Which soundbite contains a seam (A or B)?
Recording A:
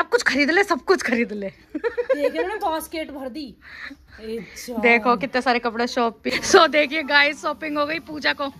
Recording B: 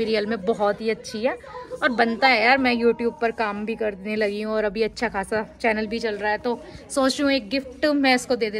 A